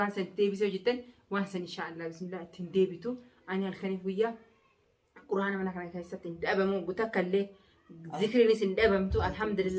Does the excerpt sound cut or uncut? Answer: uncut